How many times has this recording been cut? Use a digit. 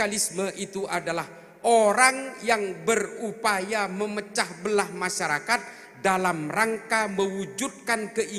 0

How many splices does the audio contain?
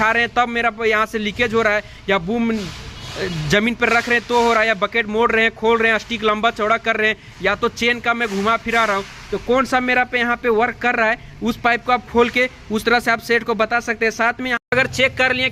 0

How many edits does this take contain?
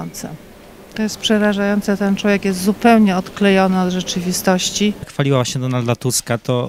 1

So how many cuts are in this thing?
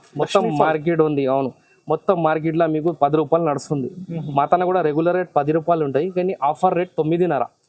0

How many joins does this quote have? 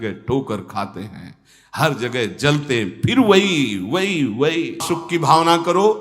1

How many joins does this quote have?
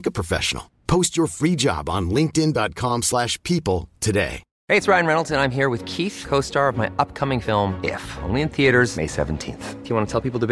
1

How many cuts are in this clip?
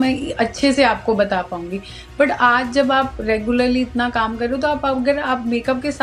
0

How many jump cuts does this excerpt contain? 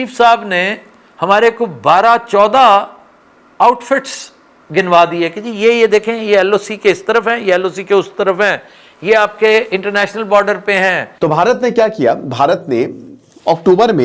1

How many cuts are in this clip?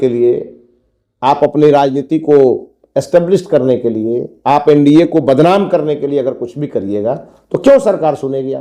0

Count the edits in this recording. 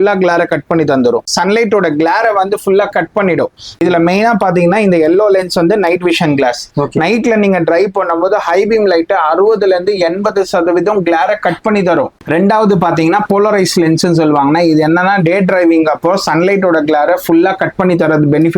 3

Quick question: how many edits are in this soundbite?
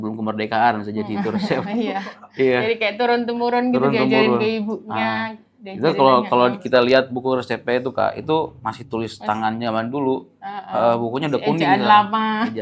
0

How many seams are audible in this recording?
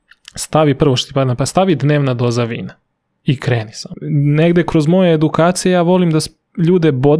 1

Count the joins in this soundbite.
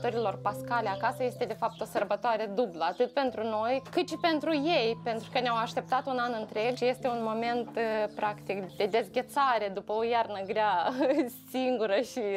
3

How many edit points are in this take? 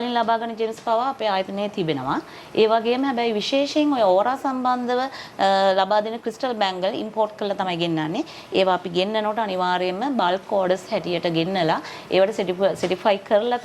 0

